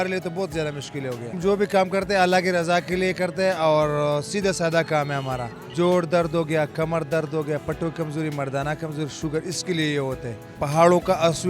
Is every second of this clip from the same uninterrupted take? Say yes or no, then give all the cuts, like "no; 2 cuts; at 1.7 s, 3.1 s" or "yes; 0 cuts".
no; 3 cuts; at 1.4 s, 5.6 s, 10.6 s